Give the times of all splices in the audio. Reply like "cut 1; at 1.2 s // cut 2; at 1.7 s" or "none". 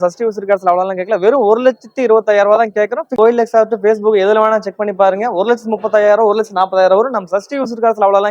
cut 1; at 3.2 s